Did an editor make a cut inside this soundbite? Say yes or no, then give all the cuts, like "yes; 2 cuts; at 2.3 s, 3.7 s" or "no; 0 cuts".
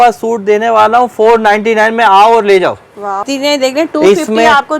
yes; 1 cut; at 3.3 s